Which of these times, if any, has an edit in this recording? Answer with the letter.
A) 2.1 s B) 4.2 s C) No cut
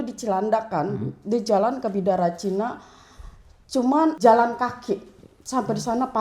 B